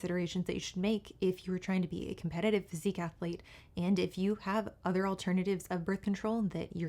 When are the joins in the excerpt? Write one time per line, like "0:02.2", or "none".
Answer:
none